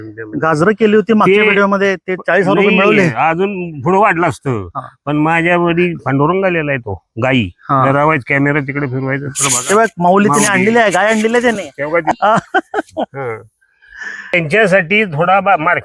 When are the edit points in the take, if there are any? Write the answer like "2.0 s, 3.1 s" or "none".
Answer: 12.2 s, 14.3 s